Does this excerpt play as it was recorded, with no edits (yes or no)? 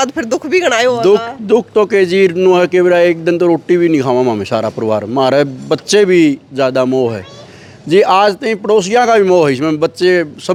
yes